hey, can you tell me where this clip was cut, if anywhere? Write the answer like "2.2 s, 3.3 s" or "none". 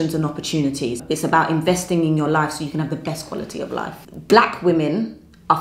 1.0 s, 4.1 s